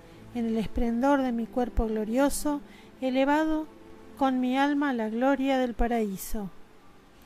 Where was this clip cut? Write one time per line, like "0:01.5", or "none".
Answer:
0:06.0